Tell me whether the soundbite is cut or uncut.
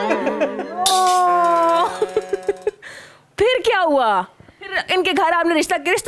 uncut